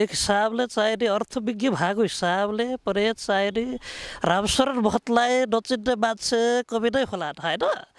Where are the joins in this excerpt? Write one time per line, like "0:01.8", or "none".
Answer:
none